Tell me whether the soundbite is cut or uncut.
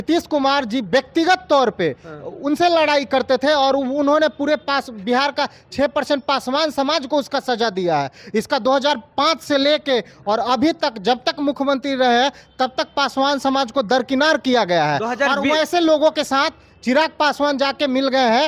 uncut